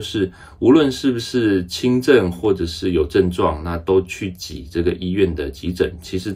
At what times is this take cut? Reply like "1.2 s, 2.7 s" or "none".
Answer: none